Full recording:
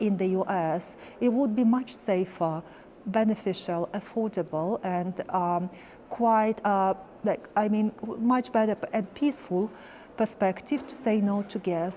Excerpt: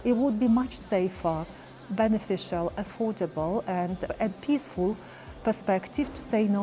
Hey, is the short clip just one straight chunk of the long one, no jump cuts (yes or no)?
no